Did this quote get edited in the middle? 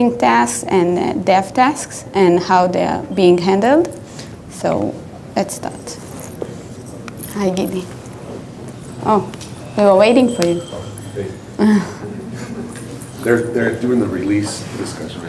yes; 1 cut; at 3.6 s

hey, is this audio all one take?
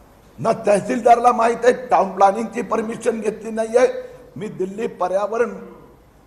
yes; 0 cuts

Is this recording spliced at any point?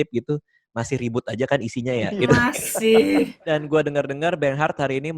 yes; 2 cuts; at 2.1 s, 3.4 s

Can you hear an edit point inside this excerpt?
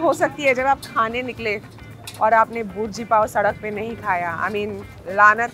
no; 0 cuts

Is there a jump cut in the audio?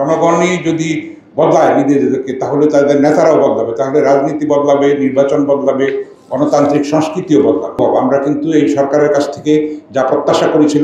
yes; 1 cut; at 7.8 s

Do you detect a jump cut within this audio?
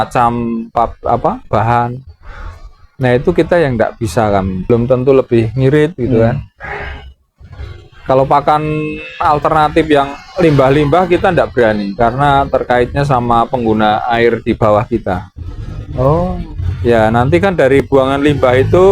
yes; 1 cut; at 4.7 s

